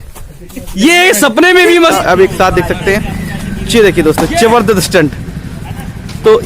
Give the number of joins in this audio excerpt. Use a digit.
1